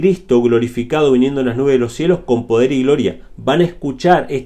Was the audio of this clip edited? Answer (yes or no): no